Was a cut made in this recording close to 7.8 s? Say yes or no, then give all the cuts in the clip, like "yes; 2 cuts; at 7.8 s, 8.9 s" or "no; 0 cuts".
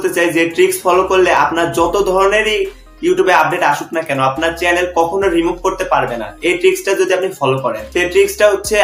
yes; 1 cut; at 7.8 s